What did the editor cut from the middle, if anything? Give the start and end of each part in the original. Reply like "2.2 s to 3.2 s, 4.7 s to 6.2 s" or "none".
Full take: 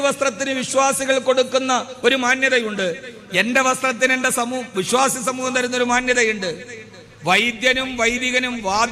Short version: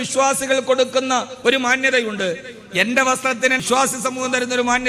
4.2 s to 4.8 s